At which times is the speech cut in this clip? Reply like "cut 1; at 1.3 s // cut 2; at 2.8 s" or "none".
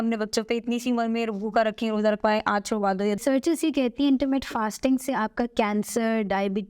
cut 1; at 3.2 s